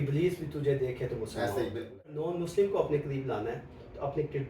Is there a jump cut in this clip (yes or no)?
yes